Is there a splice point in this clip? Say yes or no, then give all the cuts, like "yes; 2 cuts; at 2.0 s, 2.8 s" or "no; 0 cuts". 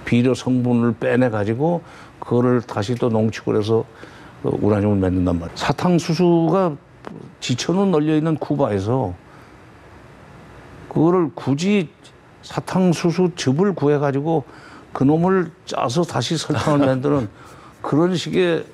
yes; 1 cut; at 5.5 s